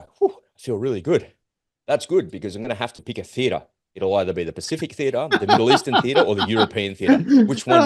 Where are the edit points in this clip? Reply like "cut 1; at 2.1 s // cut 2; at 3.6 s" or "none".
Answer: none